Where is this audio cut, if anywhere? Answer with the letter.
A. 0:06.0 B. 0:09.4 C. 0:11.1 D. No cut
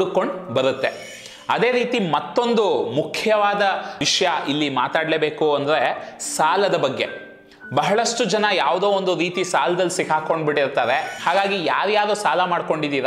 C